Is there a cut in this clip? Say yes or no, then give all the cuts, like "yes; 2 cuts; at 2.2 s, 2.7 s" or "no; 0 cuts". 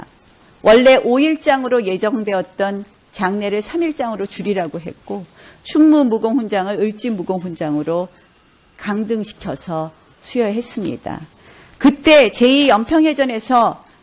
yes; 1 cut; at 13.0 s